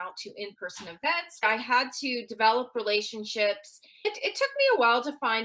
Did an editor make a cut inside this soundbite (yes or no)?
yes